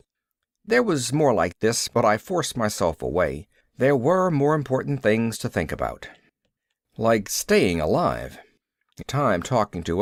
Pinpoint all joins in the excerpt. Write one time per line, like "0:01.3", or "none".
none